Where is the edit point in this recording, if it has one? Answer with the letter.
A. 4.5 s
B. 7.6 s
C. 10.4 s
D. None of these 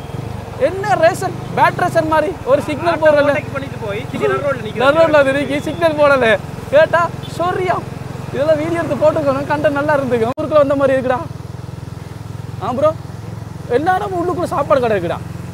C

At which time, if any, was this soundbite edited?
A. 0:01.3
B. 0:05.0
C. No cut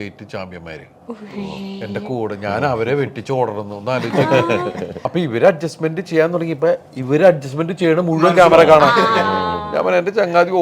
B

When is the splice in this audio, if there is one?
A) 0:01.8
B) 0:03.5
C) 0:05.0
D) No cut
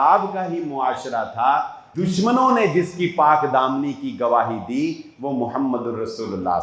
A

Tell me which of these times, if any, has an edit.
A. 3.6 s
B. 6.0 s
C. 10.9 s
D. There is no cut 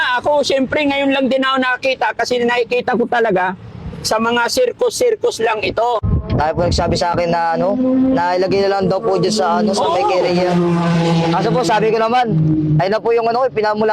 B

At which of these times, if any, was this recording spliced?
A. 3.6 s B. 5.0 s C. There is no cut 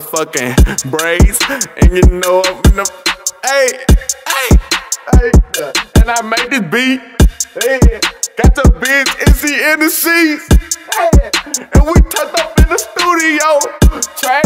C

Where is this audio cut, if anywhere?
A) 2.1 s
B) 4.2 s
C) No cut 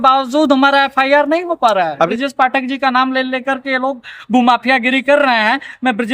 A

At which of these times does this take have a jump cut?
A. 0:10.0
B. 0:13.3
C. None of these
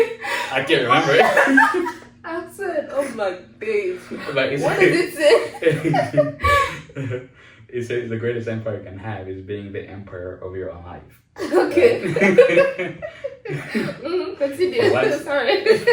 C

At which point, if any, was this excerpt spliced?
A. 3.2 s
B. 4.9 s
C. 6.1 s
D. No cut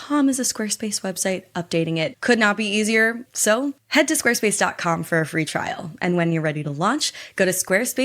A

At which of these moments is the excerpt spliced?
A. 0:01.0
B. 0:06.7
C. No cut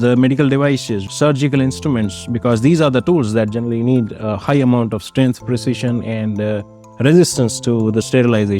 A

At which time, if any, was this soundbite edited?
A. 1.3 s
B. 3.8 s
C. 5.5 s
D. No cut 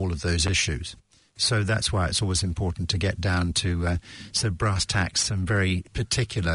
D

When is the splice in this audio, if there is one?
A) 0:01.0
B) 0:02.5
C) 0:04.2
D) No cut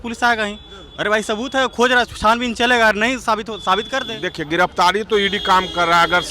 C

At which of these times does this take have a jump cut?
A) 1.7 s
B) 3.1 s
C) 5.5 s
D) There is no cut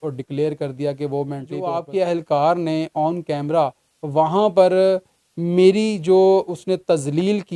A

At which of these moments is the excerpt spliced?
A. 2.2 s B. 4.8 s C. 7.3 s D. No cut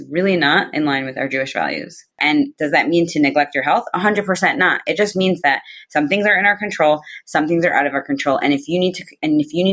A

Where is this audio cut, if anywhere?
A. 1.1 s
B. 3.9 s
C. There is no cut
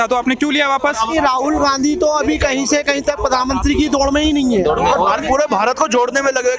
A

